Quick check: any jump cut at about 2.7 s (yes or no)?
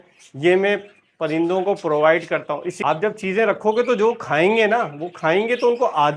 yes